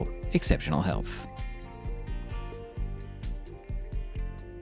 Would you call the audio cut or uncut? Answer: cut